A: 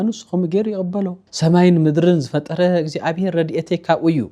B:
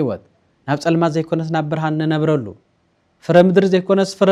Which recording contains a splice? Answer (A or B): A